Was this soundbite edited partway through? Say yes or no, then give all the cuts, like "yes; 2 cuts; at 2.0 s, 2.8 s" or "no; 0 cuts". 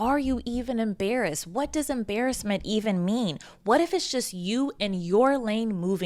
no; 0 cuts